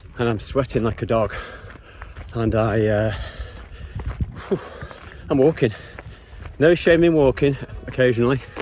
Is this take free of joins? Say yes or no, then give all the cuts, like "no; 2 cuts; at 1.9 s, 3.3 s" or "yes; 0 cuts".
yes; 0 cuts